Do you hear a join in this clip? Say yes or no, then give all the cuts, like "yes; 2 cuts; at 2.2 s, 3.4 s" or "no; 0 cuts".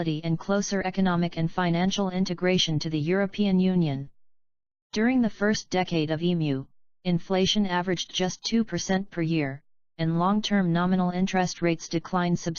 no; 0 cuts